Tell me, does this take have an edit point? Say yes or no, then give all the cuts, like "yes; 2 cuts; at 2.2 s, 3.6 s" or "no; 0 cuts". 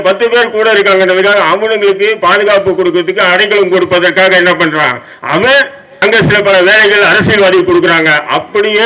yes; 1 cut; at 5.8 s